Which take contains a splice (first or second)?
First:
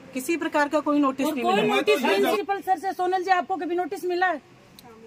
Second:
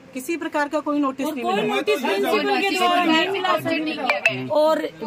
first